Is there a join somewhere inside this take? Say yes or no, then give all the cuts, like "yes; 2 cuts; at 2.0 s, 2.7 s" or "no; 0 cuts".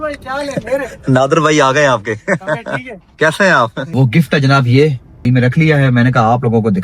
yes; 2 cuts; at 3.8 s, 5.2 s